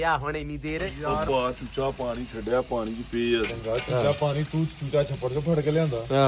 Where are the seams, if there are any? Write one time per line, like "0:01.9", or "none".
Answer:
0:01.3